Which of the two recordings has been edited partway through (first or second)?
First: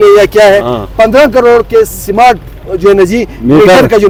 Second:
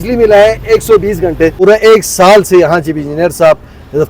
second